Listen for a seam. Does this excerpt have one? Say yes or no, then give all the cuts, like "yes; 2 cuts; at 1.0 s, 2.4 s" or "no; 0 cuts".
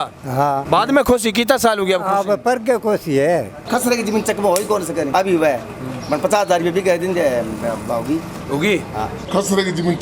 yes; 1 cut; at 3.6 s